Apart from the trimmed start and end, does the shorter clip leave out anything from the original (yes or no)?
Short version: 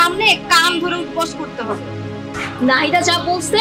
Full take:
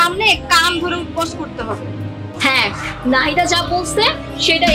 yes